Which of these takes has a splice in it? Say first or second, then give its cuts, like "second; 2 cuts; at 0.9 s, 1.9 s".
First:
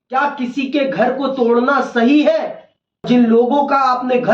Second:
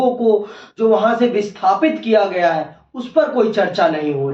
first; 1 cut; at 3.0 s